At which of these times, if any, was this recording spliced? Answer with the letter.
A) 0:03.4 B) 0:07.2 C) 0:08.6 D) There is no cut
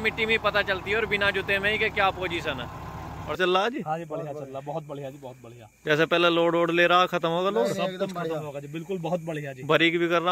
A